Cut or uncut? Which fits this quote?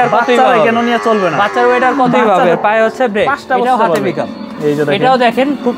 uncut